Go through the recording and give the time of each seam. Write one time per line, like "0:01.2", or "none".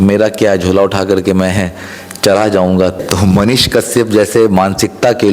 0:03.0